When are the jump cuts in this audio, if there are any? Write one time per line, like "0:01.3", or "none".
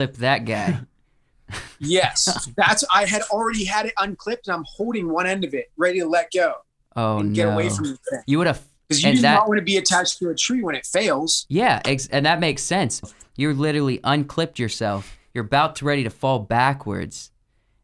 0:13.1